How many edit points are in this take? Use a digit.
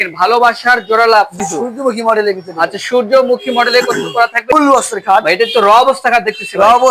2